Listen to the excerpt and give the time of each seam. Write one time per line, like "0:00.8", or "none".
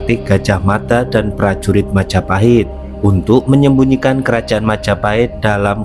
none

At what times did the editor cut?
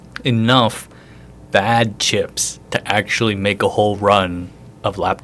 none

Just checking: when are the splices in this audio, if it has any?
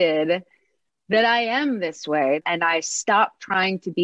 0:02.4

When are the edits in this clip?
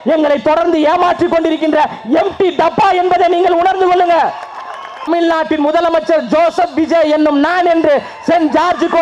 0:05.1

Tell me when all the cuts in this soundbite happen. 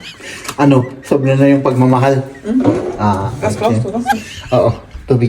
0:03.3

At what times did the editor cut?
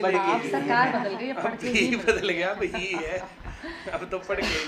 none

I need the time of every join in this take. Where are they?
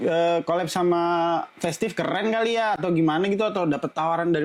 none

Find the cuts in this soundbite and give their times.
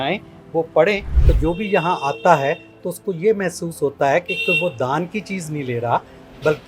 0:01.2

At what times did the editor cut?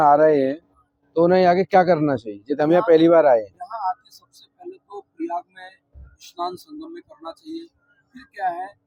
none

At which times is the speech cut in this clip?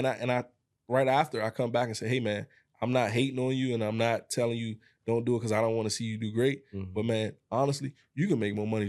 none

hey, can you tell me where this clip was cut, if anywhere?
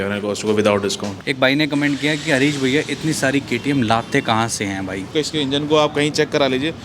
0:01.1
0:05.1

